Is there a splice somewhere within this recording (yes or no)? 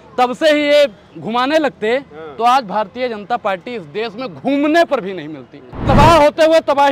yes